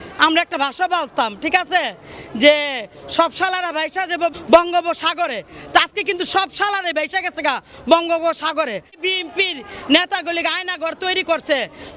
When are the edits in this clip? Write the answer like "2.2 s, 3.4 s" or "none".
4.3 s, 9.0 s